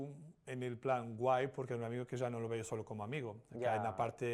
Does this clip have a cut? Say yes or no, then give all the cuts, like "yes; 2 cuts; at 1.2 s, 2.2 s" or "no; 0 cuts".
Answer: no; 0 cuts